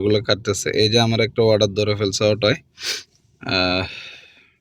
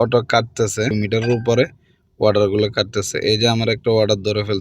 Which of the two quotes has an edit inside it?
second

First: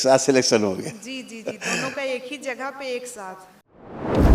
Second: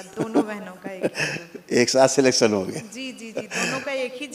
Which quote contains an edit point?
first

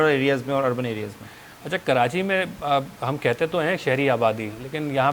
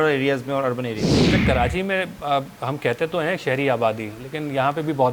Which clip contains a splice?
second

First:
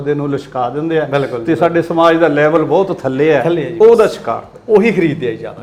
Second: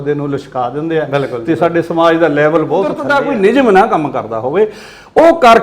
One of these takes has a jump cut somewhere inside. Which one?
second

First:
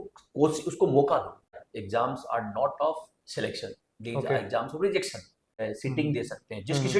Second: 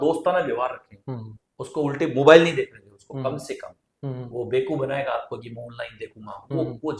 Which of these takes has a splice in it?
first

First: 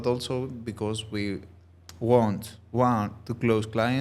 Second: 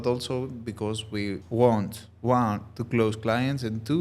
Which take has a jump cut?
second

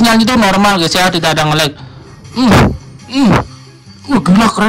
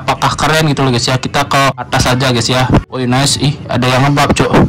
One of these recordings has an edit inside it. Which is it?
second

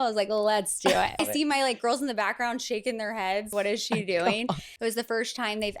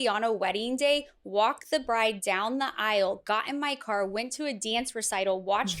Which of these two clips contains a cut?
first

